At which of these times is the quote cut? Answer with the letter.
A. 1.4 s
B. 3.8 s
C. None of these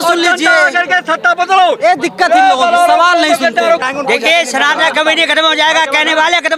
B